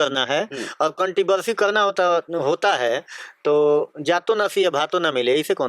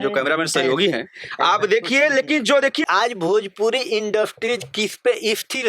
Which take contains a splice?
second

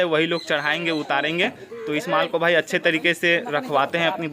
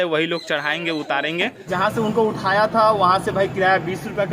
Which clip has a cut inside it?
second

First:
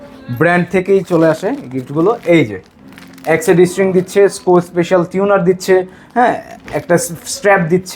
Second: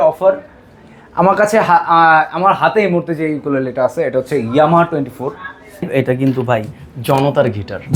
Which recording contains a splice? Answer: second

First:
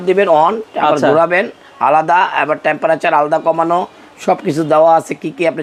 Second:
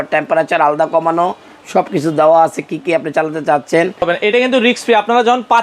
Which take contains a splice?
second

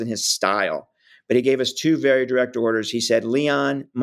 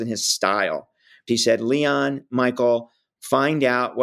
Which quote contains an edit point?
second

